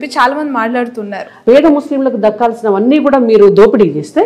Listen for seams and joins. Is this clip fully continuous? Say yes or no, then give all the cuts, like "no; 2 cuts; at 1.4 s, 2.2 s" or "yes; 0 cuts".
no; 1 cut; at 1.4 s